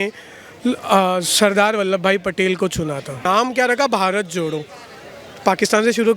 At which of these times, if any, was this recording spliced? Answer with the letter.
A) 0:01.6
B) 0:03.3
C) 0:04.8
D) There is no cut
B